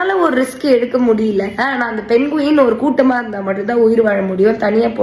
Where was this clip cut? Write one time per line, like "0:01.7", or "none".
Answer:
none